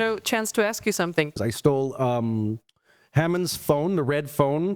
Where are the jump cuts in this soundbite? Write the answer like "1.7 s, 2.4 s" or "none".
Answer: 1.3 s